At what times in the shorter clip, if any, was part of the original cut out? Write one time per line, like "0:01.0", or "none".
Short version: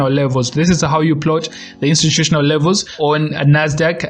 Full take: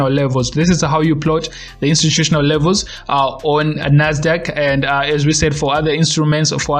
0:02.9